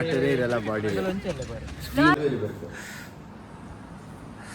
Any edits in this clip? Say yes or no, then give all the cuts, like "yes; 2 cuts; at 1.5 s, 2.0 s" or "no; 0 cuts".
yes; 1 cut; at 2.1 s